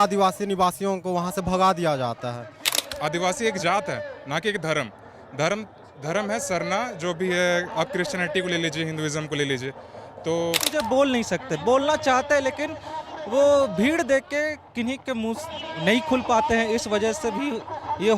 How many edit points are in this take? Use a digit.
2